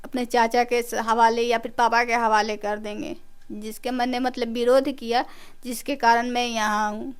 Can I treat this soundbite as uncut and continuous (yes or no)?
yes